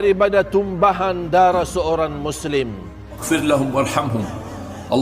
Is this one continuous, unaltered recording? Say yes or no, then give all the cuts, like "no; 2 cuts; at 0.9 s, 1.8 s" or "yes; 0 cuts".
no; 1 cut; at 3.2 s